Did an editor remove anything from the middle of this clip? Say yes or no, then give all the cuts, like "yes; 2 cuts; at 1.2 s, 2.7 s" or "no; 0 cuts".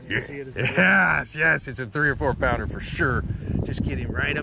no; 0 cuts